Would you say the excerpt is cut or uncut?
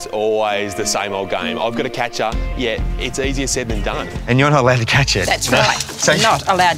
cut